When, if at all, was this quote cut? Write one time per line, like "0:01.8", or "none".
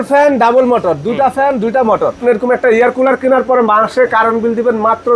0:02.2